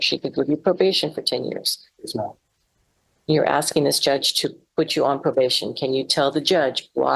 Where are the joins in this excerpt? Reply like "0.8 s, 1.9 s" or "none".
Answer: none

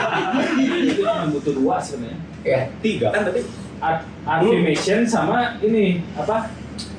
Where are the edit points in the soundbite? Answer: 1.2 s

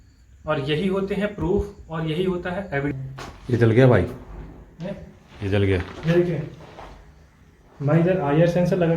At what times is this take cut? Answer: 2.9 s

